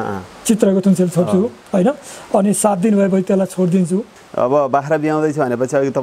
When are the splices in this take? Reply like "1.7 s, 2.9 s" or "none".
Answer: 4.2 s